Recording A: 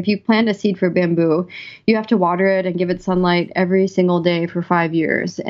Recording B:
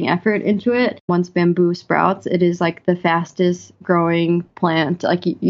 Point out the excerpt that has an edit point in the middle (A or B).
B